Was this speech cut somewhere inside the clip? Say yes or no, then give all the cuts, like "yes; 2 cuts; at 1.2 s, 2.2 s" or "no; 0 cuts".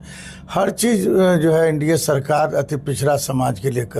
no; 0 cuts